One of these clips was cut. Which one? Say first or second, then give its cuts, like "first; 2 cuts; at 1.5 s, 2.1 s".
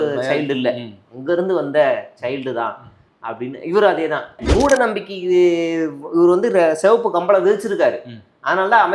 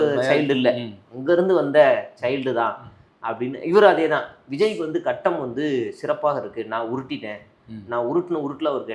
first; 1 cut; at 4.4 s